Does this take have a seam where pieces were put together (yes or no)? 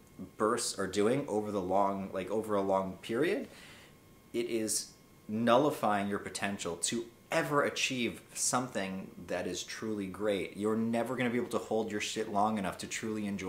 no